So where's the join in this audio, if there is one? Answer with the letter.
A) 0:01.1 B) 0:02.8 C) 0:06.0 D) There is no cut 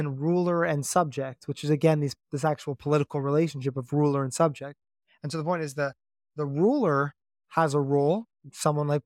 D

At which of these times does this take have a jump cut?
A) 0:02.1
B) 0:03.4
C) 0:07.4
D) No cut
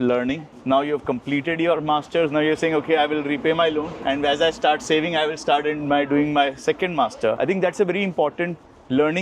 C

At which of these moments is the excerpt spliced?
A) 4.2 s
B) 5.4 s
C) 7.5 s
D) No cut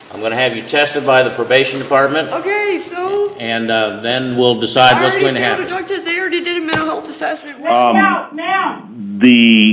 C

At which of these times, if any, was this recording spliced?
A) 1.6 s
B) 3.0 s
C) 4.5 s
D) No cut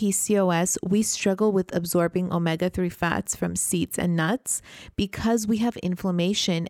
D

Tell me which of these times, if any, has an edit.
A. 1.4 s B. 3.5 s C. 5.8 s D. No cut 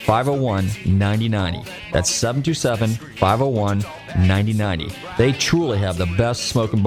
D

